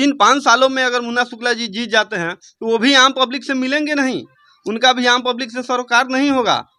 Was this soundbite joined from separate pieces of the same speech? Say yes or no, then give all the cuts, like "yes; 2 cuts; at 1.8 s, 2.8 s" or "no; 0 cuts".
no; 0 cuts